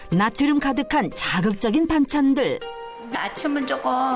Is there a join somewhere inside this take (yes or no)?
no